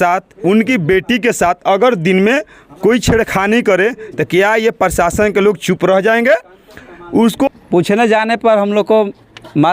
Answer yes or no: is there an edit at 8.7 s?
no